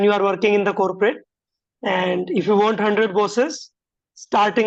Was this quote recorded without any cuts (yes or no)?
yes